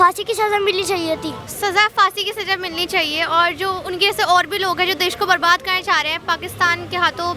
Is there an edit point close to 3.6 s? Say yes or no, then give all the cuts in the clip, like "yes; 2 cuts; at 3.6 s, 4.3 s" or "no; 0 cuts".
no; 1 cut; at 1.5 s